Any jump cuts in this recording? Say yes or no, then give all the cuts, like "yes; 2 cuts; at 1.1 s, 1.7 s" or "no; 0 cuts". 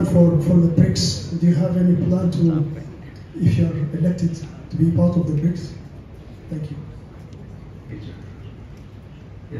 yes; 1 cut; at 7.9 s